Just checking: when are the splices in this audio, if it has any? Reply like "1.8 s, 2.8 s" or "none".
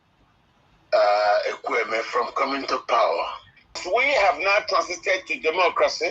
3.8 s